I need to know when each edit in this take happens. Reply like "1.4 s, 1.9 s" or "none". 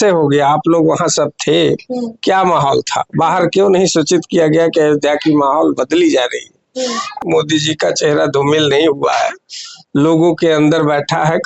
7.2 s